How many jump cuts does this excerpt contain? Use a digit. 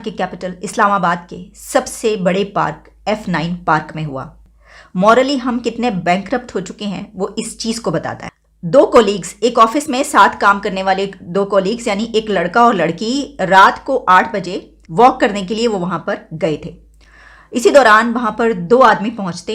0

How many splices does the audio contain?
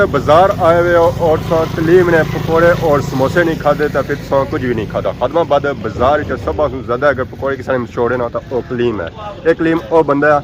0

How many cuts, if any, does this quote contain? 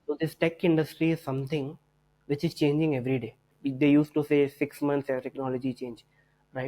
1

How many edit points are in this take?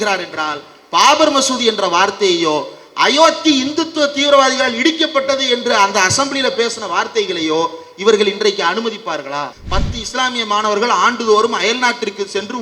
1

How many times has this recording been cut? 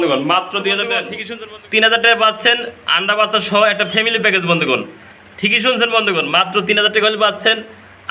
1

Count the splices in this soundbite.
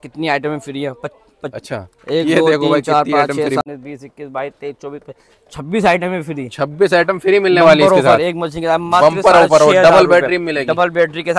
1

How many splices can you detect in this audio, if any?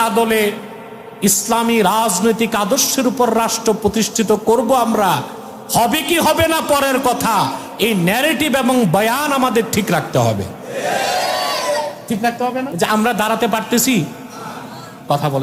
1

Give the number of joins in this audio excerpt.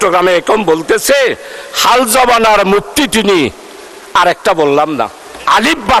0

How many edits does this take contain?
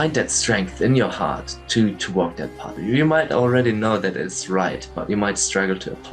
1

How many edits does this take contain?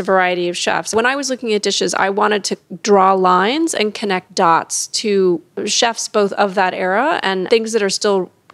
3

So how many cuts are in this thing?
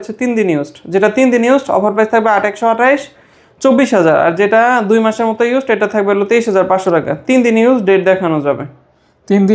0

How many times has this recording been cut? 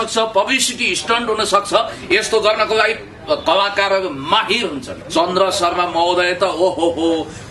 1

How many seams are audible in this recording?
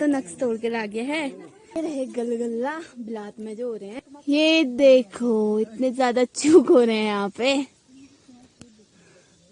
2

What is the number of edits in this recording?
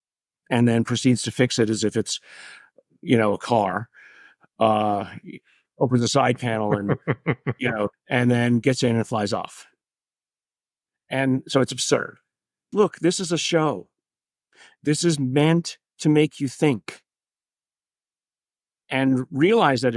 2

